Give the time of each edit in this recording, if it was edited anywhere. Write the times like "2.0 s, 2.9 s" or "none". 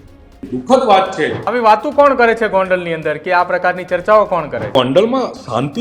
1.4 s, 4.8 s